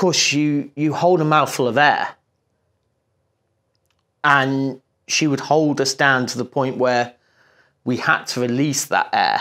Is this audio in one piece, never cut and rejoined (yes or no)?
yes